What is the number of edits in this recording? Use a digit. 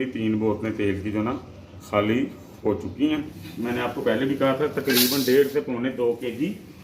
1